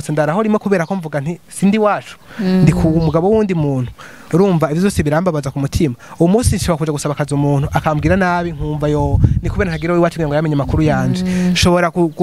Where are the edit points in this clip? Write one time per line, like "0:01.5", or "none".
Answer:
none